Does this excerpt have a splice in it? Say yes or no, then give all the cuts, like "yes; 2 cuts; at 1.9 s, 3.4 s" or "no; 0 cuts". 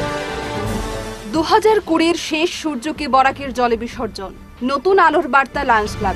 no; 0 cuts